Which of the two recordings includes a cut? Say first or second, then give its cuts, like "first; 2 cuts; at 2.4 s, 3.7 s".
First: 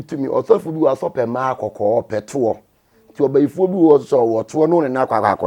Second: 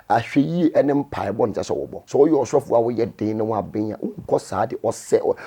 second; 1 cut; at 1.9 s